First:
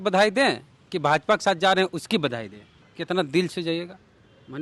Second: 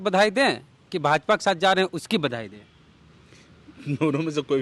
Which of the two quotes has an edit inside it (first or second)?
first